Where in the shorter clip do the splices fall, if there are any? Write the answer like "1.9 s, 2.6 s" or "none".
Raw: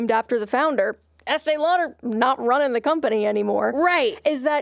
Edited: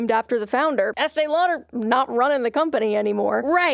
0.9 s